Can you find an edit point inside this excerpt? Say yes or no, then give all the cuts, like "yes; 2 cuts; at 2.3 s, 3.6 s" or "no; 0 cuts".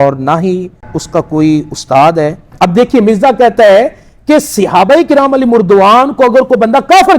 yes; 2 cuts; at 0.9 s, 2.4 s